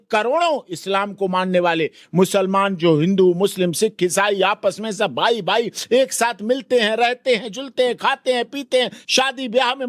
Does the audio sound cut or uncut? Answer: uncut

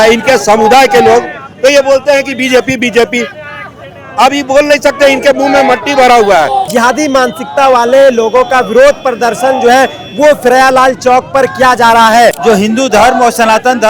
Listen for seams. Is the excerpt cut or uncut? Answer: cut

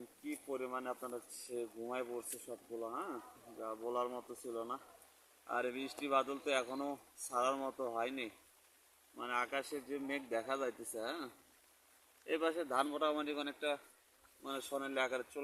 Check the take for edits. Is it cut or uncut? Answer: uncut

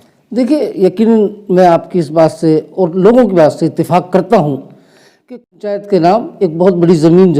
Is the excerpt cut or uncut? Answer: cut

